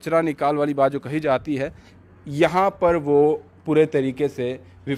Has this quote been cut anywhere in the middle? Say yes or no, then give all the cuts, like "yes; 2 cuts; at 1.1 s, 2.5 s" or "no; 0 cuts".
no; 0 cuts